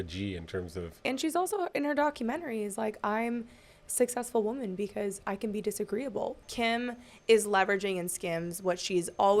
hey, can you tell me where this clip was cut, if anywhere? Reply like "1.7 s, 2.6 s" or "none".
1.1 s, 6.4 s

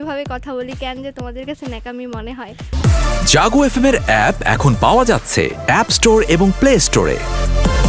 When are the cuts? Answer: 2.6 s

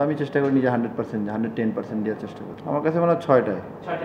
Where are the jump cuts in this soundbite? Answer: 2.5 s

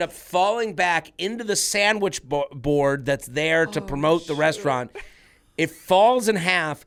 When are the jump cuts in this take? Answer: none

